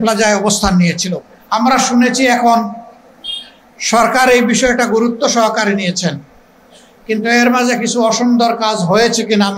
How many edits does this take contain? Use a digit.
1